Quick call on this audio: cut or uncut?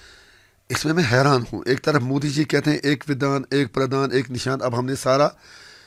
uncut